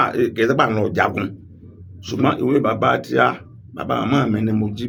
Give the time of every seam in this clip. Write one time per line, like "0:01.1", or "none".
none